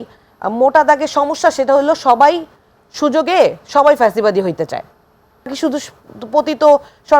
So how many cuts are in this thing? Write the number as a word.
one